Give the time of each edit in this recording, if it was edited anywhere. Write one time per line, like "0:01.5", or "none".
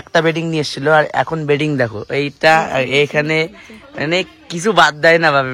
none